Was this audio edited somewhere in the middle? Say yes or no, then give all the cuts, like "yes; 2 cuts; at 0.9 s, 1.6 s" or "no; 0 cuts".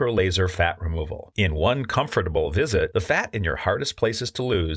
no; 0 cuts